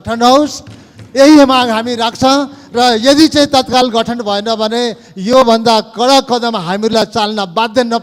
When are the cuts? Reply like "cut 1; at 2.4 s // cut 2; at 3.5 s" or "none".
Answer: none